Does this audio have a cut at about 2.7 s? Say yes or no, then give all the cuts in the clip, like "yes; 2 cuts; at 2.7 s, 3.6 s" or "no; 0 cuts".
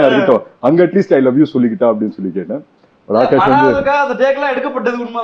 no; 0 cuts